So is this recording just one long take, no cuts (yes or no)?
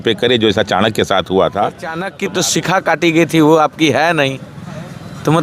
no